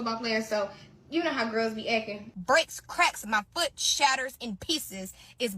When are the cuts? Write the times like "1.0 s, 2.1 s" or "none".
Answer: 2.3 s